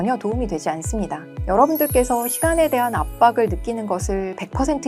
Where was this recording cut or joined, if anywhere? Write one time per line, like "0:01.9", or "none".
0:01.3